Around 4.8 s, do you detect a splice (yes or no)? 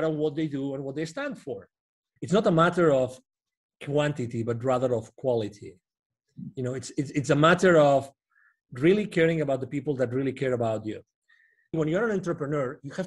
no